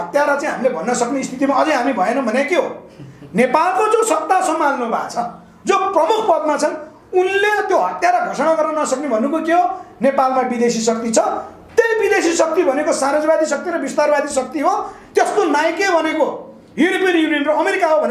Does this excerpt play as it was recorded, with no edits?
yes; 0 cuts

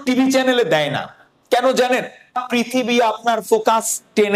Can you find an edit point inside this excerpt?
yes; 1 cut; at 2.4 s

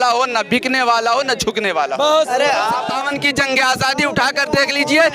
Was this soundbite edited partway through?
yes; 1 cut; at 2.9 s

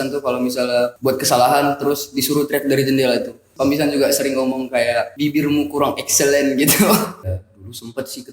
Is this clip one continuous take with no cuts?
no; 4 cuts; at 1.0 s, 3.5 s, 5.1 s, 7.2 s

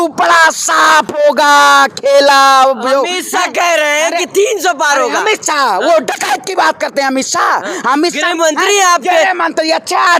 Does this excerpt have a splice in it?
no; 0 cuts

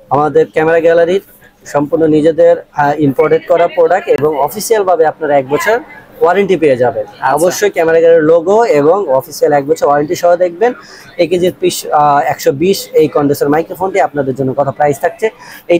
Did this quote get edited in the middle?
no; 0 cuts

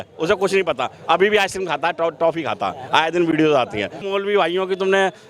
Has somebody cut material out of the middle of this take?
yes; 1 cut; at 4.0 s

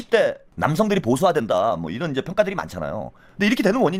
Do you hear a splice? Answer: no; 0 cuts

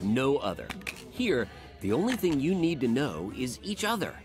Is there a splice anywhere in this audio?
no; 0 cuts

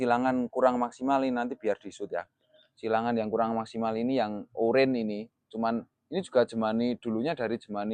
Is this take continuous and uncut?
yes; 0 cuts

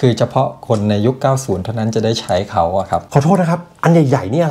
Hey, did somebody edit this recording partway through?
yes; 1 cut; at 3.1 s

